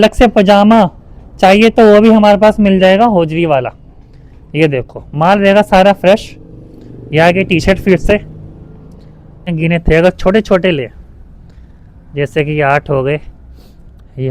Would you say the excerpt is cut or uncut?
cut